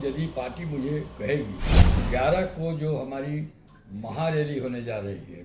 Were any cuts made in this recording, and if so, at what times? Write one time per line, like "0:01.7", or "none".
0:02.0